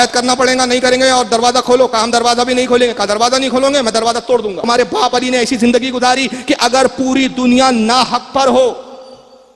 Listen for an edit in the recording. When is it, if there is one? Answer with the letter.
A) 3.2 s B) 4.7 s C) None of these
B